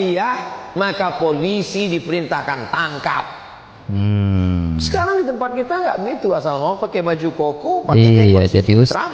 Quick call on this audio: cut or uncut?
uncut